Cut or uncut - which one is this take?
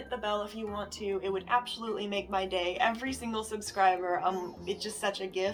uncut